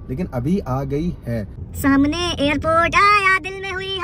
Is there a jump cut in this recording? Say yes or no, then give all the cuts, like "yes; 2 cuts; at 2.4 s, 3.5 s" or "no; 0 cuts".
yes; 1 cut; at 1.6 s